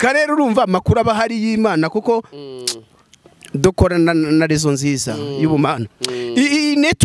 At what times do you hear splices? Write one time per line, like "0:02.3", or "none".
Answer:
none

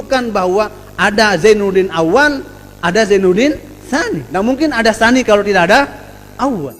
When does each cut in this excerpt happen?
0:04.2

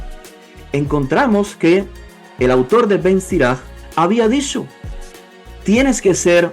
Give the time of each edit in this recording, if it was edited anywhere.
0:03.8

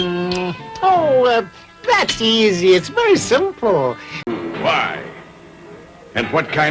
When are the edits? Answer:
0:04.2

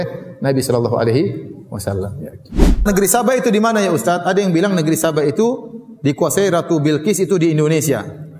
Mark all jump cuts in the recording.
0:02.8

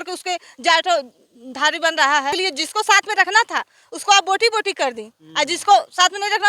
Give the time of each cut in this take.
0:02.3

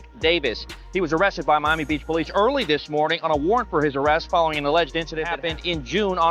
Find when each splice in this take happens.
0:05.3

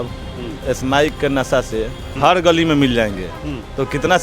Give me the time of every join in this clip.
0:02.1

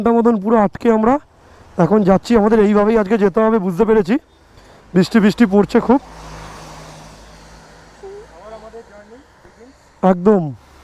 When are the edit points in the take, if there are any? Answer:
none

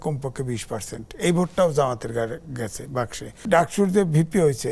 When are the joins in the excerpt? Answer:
0:03.4

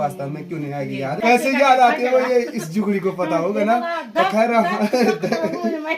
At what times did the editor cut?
0:01.1

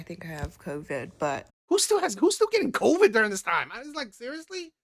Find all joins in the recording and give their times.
none

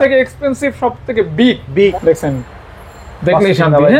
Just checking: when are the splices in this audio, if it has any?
0:01.9

